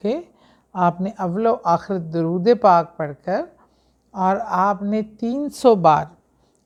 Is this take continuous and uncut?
yes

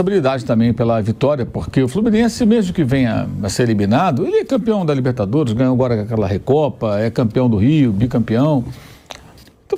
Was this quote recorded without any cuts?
yes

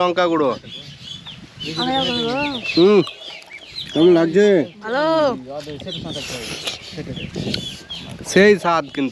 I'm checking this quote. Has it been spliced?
no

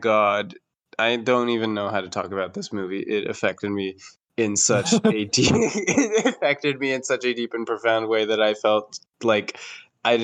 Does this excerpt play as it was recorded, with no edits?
yes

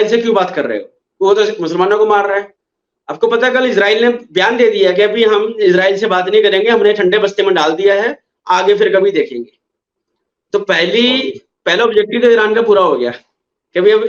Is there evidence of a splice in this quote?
no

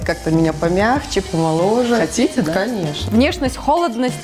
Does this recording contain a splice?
yes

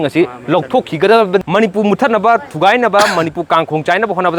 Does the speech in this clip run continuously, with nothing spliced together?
no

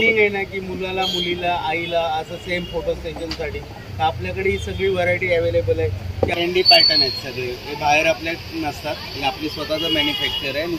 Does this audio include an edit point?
yes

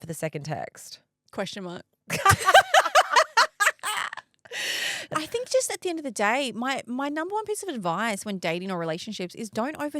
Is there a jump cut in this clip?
yes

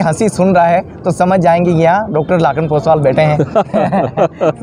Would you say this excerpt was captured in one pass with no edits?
yes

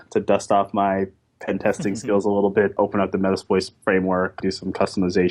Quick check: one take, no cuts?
no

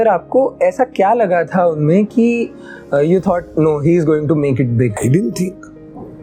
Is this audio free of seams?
yes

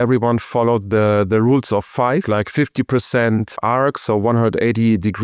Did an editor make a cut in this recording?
yes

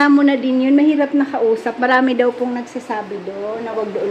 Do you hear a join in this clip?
no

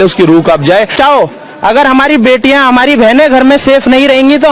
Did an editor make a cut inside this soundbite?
yes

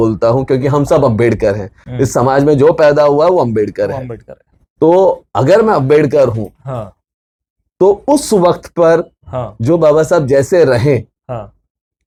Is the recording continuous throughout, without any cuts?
yes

